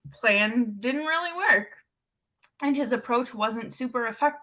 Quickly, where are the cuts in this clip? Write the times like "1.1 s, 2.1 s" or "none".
none